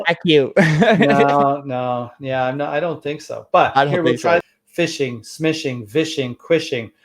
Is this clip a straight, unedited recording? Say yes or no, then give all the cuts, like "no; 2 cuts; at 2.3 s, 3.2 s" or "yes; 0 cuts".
no; 1 cut; at 4.6 s